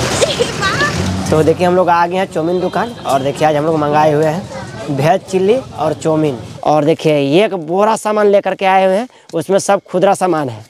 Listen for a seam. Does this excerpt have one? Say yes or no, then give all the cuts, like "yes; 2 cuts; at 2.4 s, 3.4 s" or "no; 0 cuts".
yes; 2 cuts; at 1.0 s, 6.5 s